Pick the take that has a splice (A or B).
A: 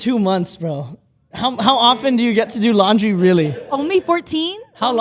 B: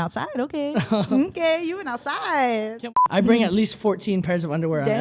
B